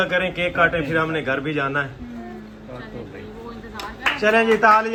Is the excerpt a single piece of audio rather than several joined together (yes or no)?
yes